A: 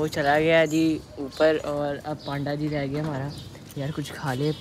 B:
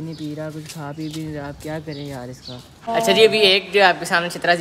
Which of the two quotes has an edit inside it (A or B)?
B